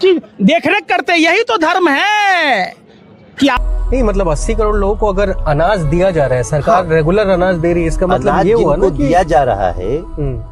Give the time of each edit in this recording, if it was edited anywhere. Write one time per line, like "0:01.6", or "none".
0:03.6